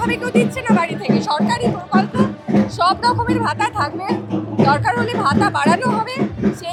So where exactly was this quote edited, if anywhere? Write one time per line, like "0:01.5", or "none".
none